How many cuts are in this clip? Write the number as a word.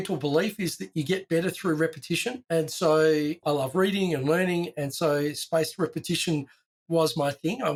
zero